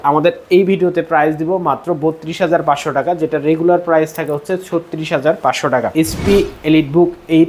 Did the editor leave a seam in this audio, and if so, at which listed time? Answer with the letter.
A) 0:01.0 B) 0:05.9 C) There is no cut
B